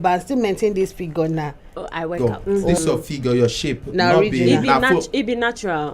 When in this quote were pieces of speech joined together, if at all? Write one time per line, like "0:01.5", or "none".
0:02.1